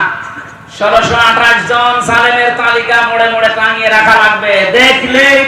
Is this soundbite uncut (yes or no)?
yes